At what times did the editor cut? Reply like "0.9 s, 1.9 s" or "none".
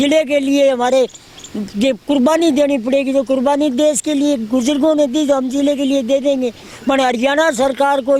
none